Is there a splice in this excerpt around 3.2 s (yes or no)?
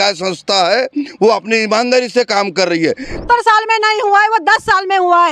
yes